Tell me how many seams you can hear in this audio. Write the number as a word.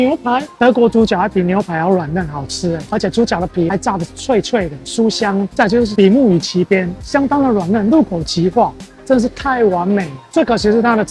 zero